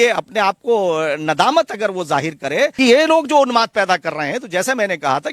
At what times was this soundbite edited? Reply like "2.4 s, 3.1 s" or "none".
2.7 s